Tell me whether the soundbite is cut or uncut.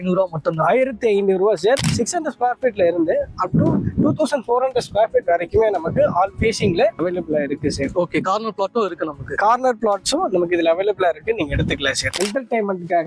cut